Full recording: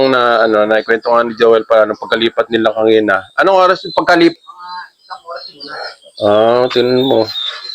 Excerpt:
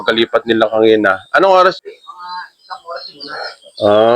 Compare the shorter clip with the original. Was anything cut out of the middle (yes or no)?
yes